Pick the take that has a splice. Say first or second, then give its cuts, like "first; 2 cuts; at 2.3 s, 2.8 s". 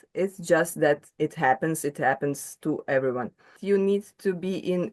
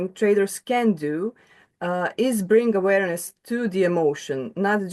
first; 1 cut; at 3.6 s